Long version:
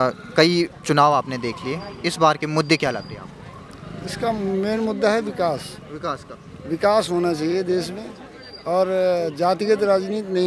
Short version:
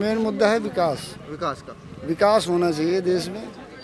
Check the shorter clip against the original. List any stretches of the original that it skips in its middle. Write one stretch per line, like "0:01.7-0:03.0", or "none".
none